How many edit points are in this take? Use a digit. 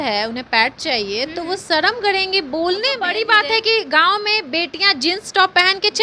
1